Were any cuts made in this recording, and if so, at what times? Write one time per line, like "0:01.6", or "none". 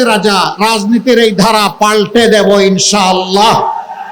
none